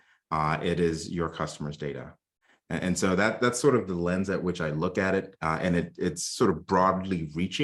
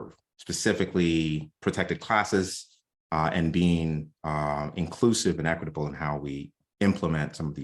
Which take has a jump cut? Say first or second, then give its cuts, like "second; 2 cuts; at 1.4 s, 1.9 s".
second; 1 cut; at 6.6 s